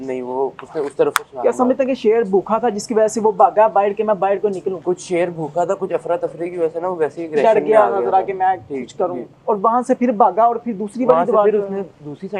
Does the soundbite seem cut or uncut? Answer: cut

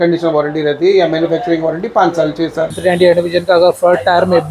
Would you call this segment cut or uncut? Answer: cut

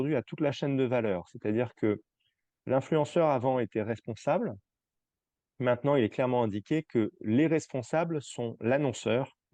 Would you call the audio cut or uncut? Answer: uncut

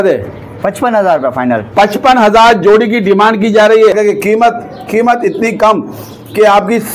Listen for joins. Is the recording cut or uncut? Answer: cut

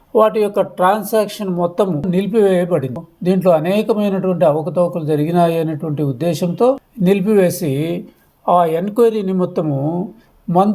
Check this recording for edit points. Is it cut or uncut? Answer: cut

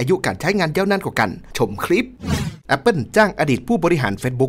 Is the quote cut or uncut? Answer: cut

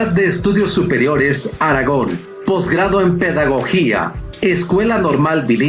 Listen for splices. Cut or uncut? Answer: cut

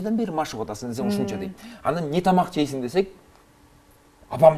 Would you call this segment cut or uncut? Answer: uncut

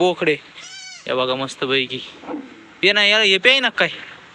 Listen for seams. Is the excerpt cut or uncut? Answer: uncut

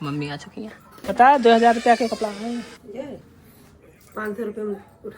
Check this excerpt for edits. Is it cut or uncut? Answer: cut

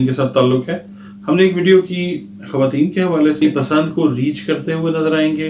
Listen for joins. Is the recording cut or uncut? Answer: cut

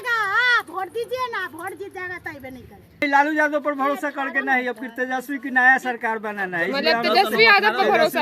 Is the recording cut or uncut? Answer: cut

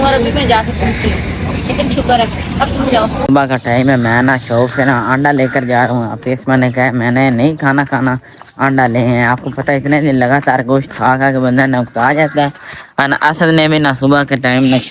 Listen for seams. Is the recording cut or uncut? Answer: uncut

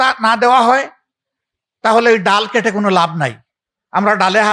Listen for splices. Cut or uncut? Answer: uncut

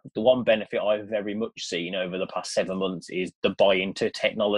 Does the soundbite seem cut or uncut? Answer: uncut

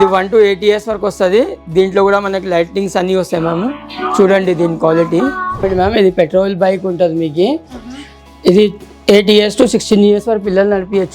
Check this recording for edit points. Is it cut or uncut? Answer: cut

